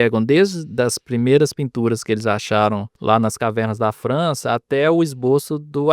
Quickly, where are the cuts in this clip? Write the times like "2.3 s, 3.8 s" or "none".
2.9 s